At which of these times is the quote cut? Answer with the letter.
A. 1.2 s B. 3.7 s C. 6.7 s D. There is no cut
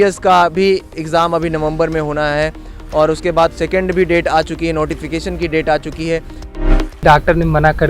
C